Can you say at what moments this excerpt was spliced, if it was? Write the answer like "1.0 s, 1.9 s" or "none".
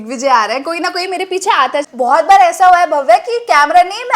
1.9 s

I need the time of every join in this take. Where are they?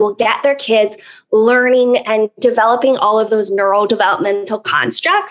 none

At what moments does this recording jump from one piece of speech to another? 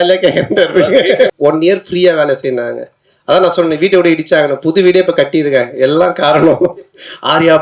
1.3 s

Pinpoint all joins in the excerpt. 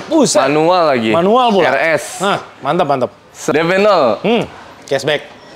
3.3 s, 4.6 s

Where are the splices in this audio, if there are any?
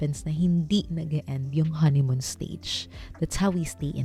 none

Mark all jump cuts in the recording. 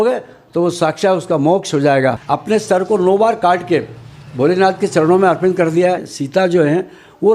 2.1 s, 6.1 s

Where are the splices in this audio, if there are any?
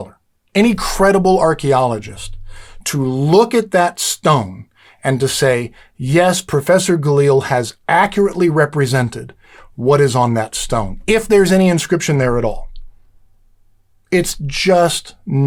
none

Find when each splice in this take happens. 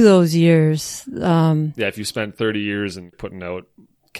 3.1 s

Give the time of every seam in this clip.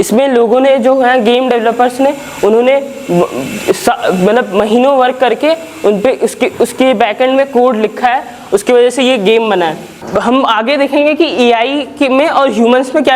9.9 s

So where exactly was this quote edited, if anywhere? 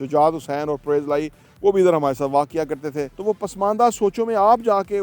3.1 s

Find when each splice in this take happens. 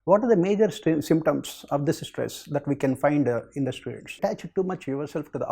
4.1 s

